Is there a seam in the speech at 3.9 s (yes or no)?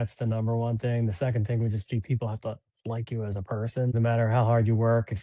yes